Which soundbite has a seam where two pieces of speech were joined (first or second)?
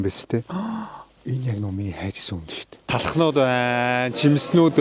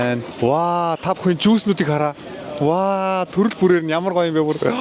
first